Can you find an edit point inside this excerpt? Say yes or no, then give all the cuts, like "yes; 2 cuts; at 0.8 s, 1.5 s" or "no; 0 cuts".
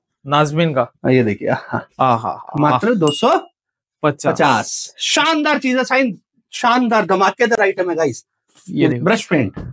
no; 0 cuts